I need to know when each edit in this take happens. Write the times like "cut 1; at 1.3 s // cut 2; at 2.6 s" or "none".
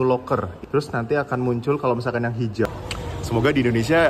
cut 1; at 2.7 s